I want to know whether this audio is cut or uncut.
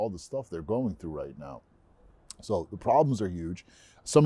uncut